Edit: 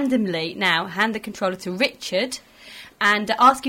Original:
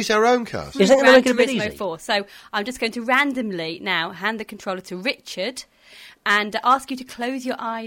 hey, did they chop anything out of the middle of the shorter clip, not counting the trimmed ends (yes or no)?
no